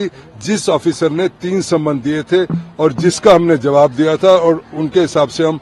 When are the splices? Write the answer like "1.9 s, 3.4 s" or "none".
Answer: none